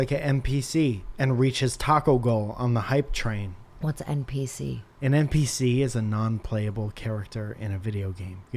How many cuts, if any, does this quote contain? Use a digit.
3